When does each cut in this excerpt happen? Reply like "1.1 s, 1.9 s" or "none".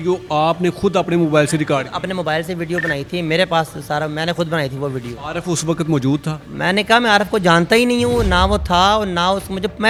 none